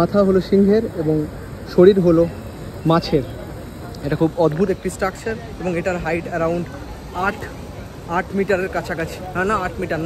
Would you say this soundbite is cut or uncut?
uncut